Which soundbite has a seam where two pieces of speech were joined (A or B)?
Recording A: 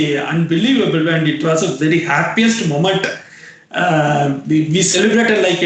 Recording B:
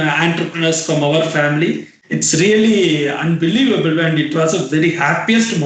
B